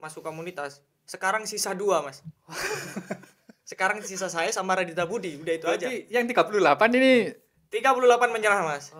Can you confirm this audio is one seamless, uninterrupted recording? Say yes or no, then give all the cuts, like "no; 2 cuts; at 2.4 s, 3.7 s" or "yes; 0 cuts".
yes; 0 cuts